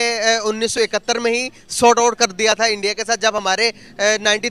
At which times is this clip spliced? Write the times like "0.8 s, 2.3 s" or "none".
none